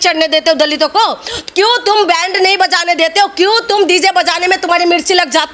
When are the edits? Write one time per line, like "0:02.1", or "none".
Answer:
none

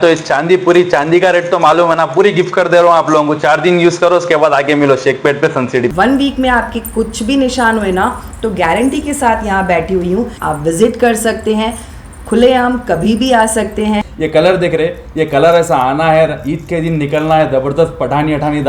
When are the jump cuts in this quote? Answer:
0:05.9
0:10.4
0:14.1

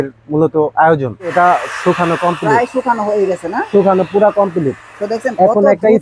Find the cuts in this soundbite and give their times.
0:01.3

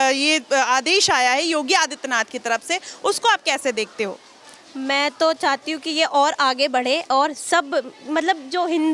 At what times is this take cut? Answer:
none

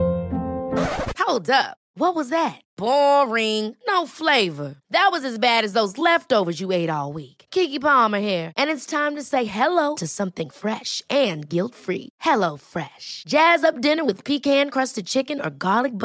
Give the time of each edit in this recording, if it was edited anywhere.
none

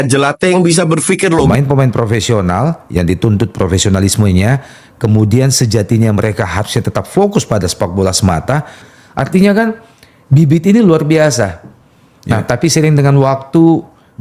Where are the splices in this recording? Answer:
0:01.5
0:08.8

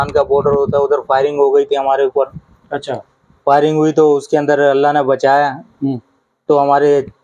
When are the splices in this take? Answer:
none

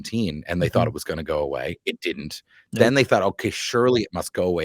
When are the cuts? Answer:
none

